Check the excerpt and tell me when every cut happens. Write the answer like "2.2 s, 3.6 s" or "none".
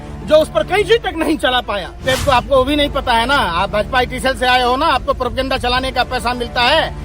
2.1 s

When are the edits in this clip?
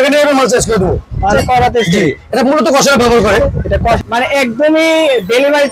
1.3 s, 4.0 s

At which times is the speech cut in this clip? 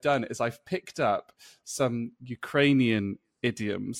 none

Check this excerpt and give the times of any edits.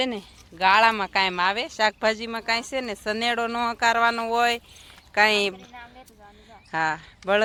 none

